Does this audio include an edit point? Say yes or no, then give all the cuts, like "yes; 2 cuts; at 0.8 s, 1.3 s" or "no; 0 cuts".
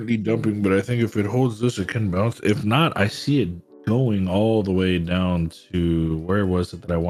no; 0 cuts